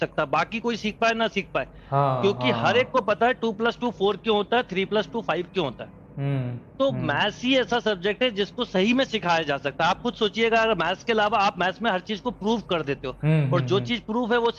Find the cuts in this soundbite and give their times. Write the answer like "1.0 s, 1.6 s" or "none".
none